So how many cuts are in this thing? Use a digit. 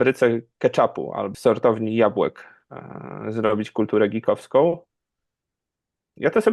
1